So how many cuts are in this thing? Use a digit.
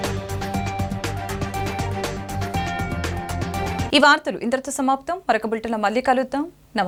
0